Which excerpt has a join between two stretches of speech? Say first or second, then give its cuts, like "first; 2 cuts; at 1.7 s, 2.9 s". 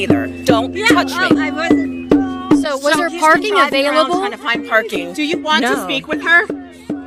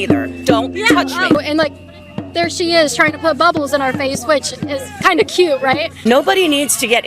second; 2 cuts; at 1.4 s, 5.9 s